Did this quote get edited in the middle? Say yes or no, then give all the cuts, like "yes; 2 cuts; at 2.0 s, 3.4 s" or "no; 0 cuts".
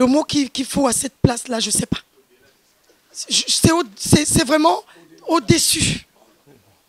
no; 0 cuts